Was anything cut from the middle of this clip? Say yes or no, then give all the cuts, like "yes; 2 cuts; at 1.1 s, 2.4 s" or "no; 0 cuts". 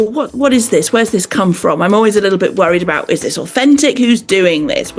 no; 0 cuts